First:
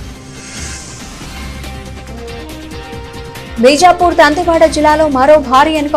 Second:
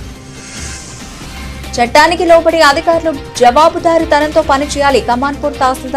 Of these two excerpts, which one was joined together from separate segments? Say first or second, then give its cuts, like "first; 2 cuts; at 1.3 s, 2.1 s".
first; 1 cut; at 1.8 s